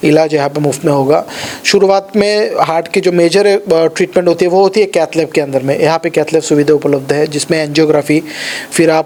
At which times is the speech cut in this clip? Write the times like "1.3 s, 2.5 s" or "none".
none